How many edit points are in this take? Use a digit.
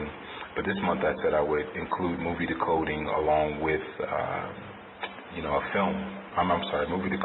1